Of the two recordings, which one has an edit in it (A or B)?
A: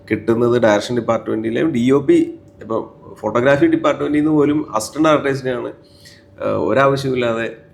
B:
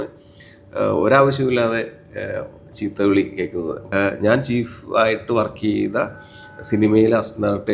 B